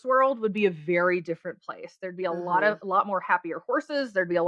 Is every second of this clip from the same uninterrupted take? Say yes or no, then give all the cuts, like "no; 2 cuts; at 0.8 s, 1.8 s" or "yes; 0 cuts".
yes; 0 cuts